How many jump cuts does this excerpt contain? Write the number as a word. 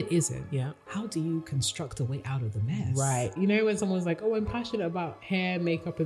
one